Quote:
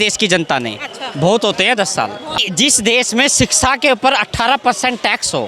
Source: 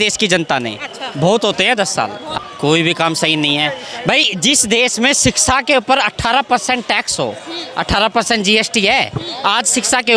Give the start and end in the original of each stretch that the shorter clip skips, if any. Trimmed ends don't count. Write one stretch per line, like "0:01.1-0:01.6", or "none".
0:02.5-0:04.3